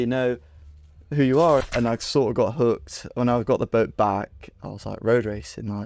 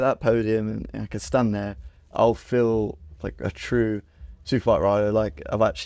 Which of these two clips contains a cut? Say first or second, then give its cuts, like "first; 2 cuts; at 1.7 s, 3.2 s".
first; 1 cut; at 1.7 s